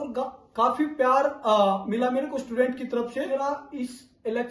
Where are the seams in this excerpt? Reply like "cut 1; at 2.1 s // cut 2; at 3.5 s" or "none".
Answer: cut 1; at 3.3 s